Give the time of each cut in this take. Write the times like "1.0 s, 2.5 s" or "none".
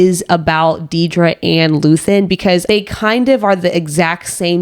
2.6 s